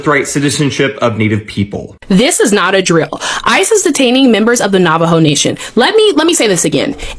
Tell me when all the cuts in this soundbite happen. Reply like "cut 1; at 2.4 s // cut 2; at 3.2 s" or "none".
cut 1; at 1.9 s